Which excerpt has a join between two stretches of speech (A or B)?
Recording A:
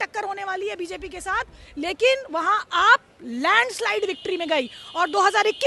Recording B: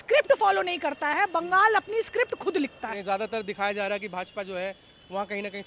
B